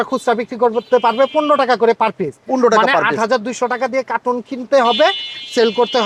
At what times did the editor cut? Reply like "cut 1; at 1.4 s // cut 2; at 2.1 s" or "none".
none